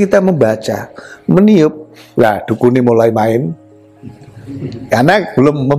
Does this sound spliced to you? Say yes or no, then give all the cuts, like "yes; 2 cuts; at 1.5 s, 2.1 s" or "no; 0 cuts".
no; 0 cuts